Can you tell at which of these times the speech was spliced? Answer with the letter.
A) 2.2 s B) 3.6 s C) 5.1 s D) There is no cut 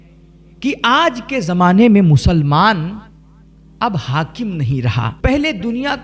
C